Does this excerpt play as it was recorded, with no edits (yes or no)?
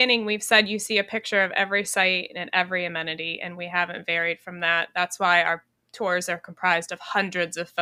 yes